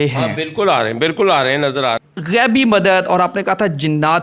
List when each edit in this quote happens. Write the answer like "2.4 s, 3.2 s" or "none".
2.0 s